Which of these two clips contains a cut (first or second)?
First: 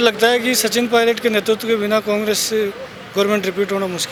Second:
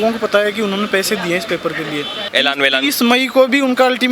second